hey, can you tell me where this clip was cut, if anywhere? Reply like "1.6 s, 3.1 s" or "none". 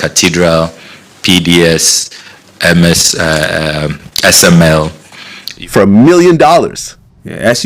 5.5 s